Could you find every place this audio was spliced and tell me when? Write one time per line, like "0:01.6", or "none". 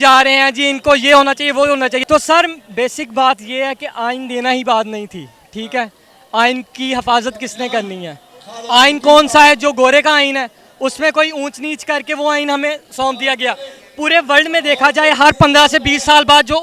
0:02.0